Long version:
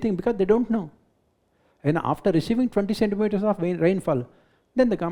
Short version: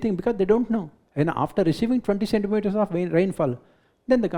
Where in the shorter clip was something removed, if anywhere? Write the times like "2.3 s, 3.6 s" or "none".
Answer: 1.0 s